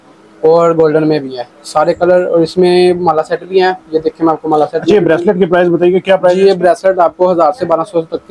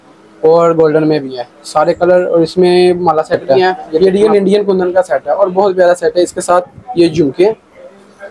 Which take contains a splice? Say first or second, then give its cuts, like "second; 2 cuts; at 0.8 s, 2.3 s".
second; 1 cut; at 4.0 s